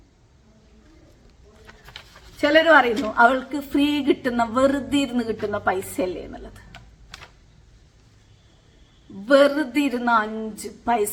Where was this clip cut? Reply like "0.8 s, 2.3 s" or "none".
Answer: none